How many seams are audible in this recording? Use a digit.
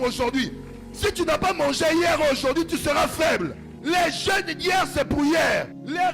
1